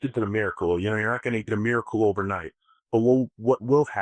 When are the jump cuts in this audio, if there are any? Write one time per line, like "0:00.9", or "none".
none